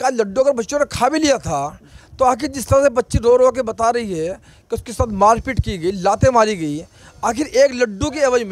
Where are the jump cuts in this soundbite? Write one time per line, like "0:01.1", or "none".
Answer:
none